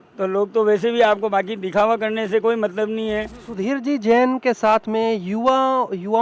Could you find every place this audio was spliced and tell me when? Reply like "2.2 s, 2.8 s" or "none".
3.4 s